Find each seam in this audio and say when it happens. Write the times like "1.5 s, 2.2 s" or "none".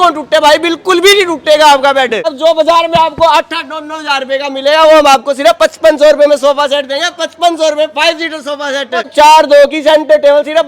2.3 s, 9.1 s

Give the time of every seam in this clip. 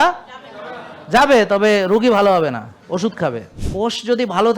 3.6 s

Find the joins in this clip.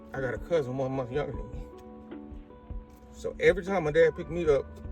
none

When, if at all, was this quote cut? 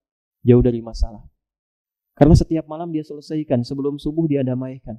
none

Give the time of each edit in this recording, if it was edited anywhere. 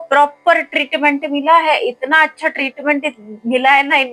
none

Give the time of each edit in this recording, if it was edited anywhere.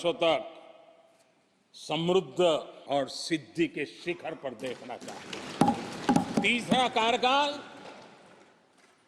2.7 s, 6.3 s

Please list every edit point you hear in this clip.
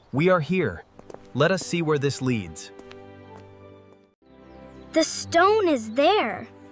4.0 s

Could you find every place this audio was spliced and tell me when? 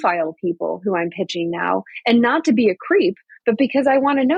none

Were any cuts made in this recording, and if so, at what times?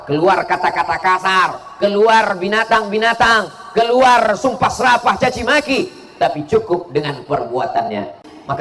none

